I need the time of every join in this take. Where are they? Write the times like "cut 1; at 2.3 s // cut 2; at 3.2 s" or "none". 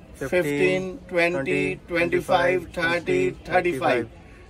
none